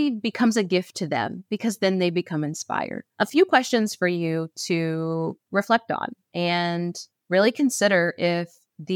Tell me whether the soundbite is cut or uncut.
cut